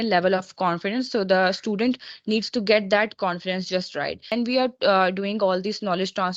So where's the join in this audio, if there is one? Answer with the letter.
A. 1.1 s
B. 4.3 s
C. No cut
B